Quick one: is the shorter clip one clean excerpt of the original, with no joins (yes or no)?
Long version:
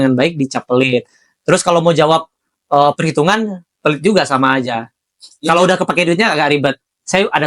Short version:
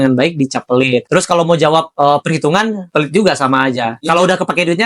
no